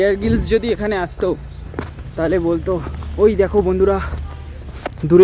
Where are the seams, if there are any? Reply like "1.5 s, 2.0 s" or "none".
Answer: 3.0 s